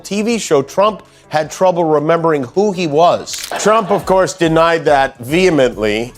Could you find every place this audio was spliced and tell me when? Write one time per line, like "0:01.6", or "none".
0:03.3